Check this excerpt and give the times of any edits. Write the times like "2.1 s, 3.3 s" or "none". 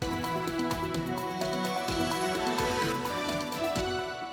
none